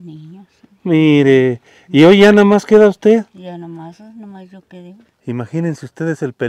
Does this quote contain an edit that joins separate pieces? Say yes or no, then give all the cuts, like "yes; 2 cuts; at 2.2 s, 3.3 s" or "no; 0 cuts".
yes; 1 cut; at 5.1 s